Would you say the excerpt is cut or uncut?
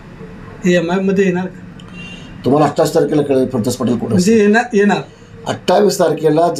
uncut